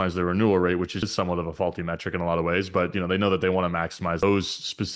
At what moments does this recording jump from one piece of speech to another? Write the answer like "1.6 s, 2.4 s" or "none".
1.1 s, 4.2 s

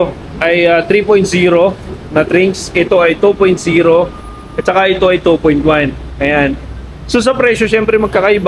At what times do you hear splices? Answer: none

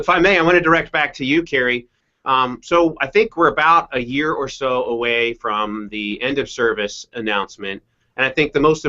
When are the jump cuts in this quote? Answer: 7.6 s

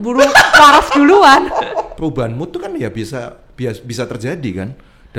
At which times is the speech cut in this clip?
1.9 s

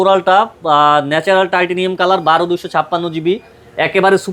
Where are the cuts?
none

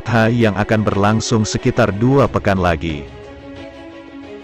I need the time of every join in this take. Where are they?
3.0 s

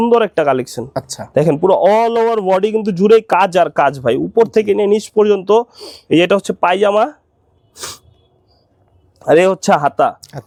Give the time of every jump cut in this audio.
none

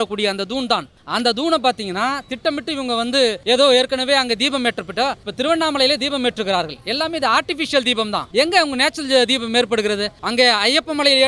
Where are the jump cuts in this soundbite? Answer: 1.0 s, 3.4 s, 5.2 s, 8.2 s, 10.2 s

